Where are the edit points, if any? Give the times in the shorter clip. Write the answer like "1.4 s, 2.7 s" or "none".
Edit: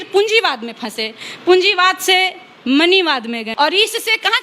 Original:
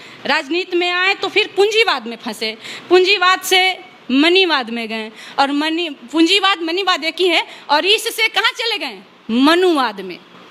3.5 s